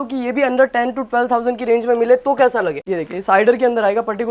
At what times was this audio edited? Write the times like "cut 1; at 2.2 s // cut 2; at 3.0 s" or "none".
cut 1; at 2.8 s